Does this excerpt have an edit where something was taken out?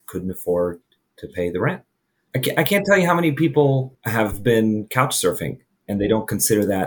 yes; 2 cuts; at 2.3 s, 4.0 s

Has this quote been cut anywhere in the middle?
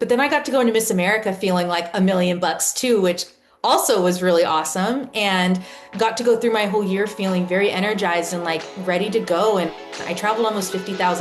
no; 0 cuts

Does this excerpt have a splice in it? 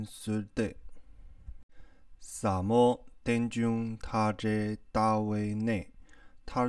no; 0 cuts

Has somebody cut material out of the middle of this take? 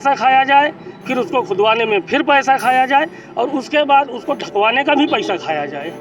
no; 0 cuts

